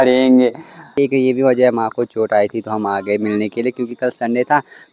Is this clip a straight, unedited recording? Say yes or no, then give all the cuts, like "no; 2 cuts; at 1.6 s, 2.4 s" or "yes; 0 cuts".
no; 1 cut; at 0.9 s